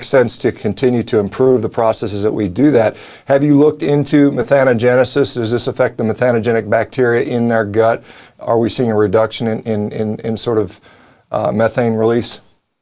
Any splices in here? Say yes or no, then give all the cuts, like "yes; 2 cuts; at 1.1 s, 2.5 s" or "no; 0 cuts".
no; 0 cuts